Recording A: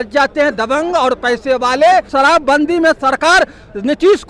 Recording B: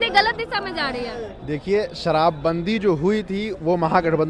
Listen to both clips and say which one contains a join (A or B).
A